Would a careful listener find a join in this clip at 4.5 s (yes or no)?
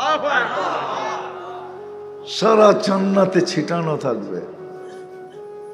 yes